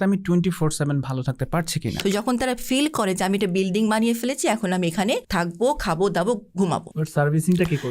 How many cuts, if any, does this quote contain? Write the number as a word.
three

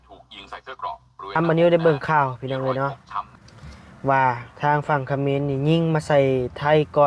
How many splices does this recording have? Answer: one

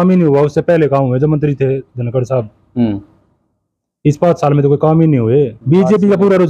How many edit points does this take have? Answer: one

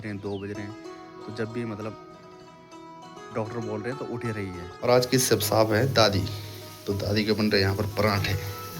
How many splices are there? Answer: one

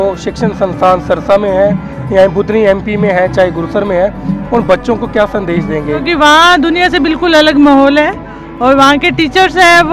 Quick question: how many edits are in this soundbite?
one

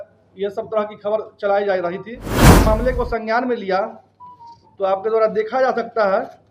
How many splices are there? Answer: one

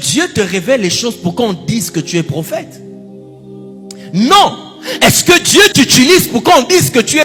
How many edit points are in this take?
zero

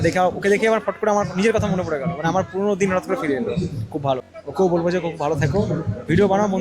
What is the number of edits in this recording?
one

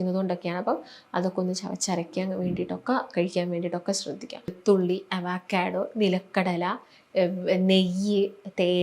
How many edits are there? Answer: one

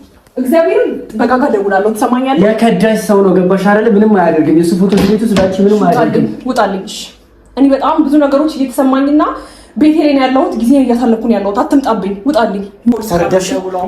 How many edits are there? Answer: one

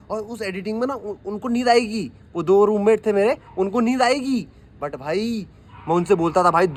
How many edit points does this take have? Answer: zero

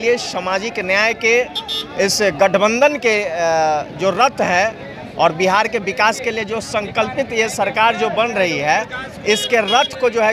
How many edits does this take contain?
zero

